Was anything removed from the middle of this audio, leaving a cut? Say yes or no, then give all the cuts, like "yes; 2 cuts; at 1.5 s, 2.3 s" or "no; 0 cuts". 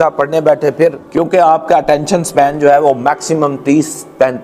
yes; 1 cut; at 1.0 s